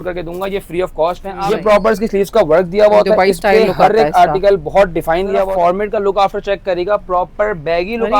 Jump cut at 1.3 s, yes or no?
yes